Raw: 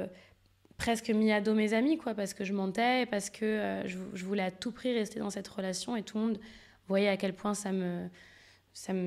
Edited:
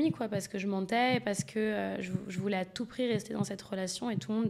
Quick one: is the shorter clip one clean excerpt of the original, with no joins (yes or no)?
yes